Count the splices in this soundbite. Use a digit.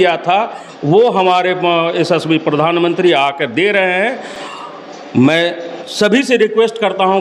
0